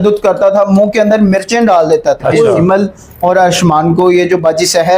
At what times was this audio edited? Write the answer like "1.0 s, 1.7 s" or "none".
2.5 s